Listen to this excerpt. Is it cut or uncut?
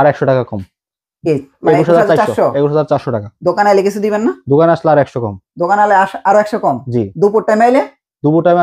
uncut